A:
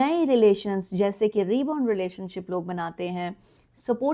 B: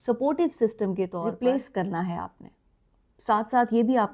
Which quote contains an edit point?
B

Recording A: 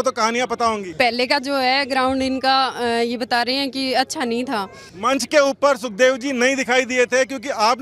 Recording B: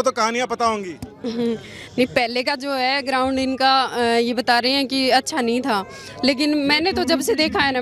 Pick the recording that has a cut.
A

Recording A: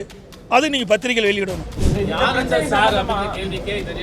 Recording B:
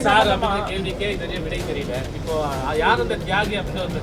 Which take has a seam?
A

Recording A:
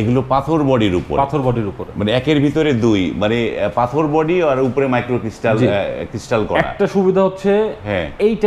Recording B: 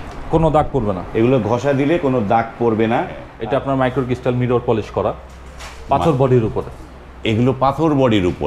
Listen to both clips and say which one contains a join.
B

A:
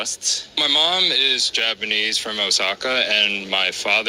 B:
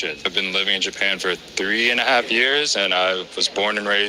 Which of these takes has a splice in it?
B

